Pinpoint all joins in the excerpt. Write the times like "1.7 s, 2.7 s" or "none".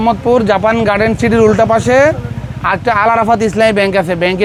none